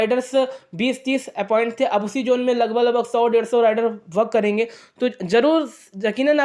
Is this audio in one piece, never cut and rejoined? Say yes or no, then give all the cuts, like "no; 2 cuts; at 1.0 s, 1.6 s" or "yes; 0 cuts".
yes; 0 cuts